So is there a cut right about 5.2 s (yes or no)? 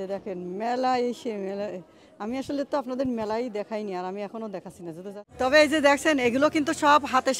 yes